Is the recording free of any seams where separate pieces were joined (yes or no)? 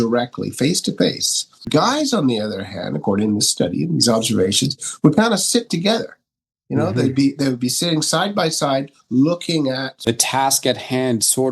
no